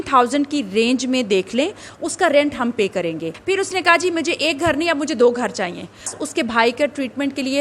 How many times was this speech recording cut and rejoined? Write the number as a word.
two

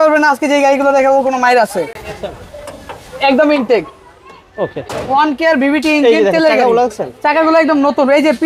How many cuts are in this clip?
zero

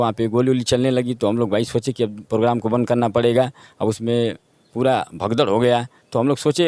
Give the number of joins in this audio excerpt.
zero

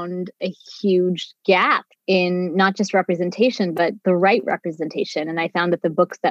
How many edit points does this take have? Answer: one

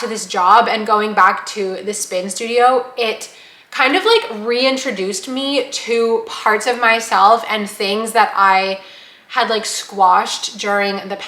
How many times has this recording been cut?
zero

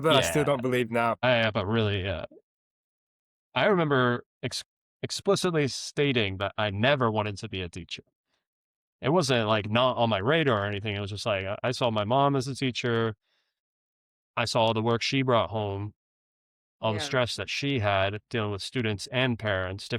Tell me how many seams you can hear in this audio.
one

